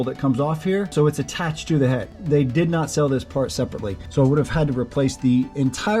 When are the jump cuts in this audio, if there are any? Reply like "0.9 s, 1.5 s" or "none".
0.9 s, 2.1 s, 4.0 s